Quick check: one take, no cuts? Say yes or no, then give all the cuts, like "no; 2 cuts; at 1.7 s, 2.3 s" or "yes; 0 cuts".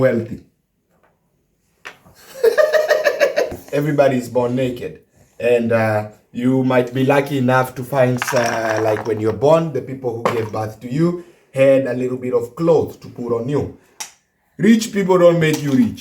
no; 2 cuts; at 3.5 s, 13.9 s